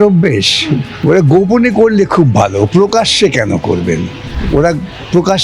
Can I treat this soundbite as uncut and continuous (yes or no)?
no